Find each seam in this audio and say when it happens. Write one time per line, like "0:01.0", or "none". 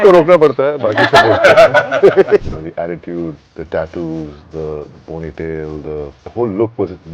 0:02.4
0:03.5
0:06.2